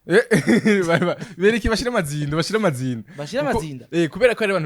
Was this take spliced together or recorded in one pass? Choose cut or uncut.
uncut